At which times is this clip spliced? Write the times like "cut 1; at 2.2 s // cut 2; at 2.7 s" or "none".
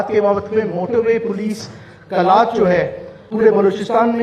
cut 1; at 3.2 s

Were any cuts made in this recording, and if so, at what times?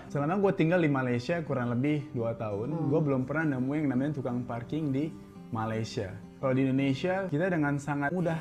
none

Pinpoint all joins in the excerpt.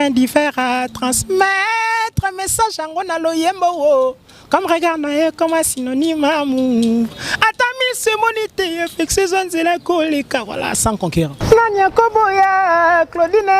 cut 1; at 11.4 s

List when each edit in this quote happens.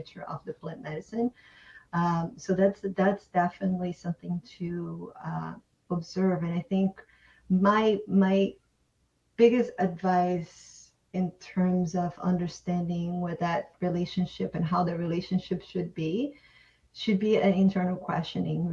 none

